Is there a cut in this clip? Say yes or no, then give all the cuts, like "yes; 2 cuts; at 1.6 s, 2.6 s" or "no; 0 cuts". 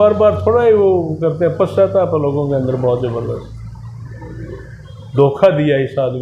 no; 0 cuts